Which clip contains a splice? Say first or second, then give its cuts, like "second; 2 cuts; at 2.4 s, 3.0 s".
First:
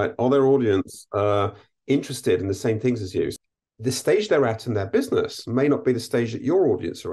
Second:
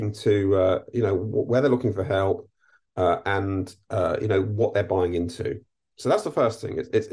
first; 1 cut; at 3.3 s